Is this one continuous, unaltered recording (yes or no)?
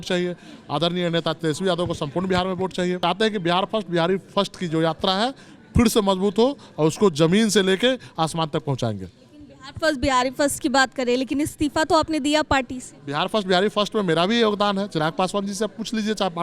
no